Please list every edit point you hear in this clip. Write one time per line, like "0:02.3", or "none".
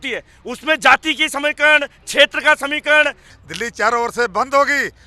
0:03.3

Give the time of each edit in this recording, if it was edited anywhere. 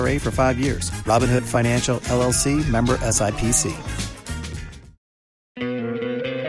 0:05.5

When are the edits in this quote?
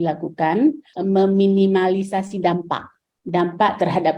none

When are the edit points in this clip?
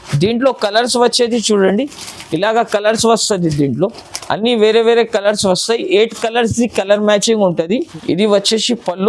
0:07.8

